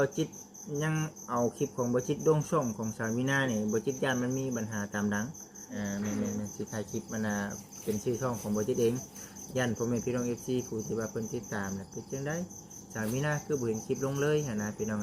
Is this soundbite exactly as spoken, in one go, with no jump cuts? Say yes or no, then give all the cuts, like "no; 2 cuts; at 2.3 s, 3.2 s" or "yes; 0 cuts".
no; 1 cut; at 5.6 s